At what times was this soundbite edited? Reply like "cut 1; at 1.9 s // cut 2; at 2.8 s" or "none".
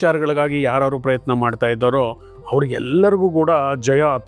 none